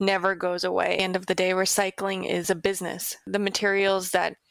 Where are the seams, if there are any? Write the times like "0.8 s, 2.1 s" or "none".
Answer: 1.0 s